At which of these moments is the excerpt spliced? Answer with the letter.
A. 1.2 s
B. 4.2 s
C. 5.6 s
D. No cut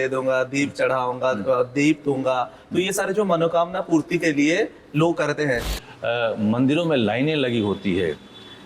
C